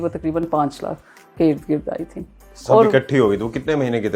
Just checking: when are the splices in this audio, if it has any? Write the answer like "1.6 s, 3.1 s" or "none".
none